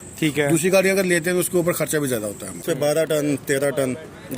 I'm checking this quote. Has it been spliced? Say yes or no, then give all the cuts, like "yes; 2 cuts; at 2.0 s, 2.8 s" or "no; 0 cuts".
yes; 1 cut; at 2.6 s